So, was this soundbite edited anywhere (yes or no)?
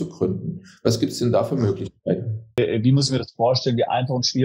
yes